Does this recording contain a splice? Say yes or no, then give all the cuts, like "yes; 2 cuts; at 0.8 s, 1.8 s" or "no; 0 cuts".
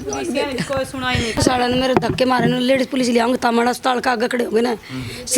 yes; 1 cut; at 1.4 s